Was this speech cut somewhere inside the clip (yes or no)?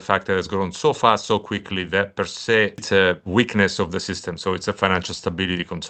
yes